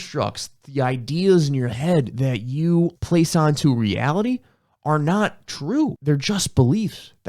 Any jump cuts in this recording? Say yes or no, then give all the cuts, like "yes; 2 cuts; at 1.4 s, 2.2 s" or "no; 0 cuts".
yes; 2 cuts; at 3.0 s, 6.0 s